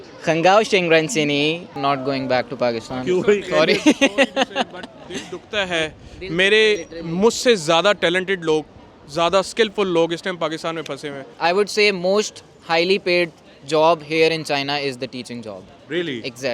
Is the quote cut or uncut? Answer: cut